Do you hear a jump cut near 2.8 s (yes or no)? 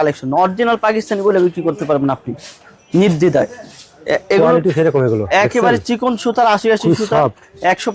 no